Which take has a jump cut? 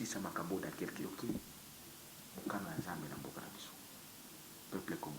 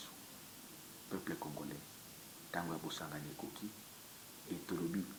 first; 1 cut; at 1.1 s

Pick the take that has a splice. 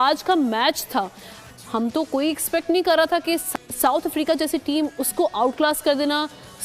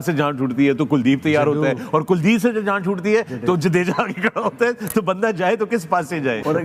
first; 1 cut; at 3.5 s

